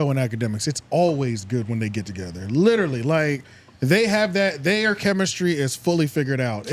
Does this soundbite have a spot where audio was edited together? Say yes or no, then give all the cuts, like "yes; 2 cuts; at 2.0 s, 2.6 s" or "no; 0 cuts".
no; 0 cuts